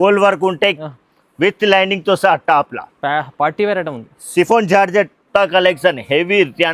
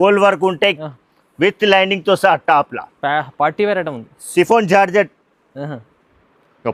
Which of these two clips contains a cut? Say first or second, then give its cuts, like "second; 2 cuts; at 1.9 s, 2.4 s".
first; 1 cut; at 5.3 s